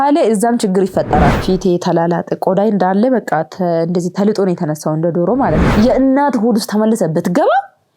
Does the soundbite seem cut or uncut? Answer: cut